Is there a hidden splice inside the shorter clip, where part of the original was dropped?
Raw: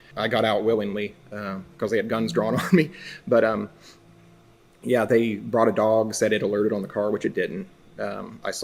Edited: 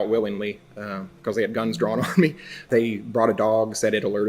yes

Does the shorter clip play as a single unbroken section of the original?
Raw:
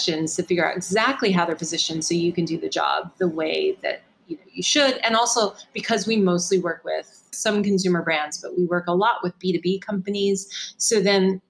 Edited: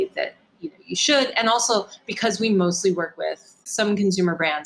yes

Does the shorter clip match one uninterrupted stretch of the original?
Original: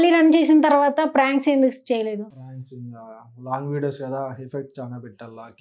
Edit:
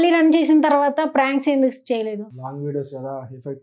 no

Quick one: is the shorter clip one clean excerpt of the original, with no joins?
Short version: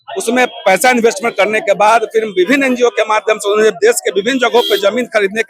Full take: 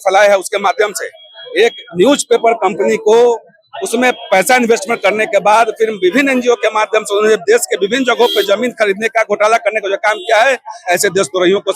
yes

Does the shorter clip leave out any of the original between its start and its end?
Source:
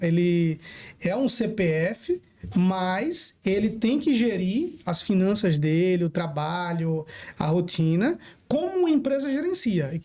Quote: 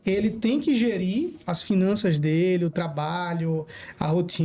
no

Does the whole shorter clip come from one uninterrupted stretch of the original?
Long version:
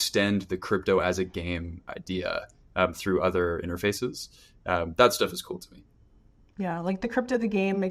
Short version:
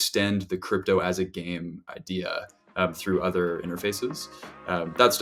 yes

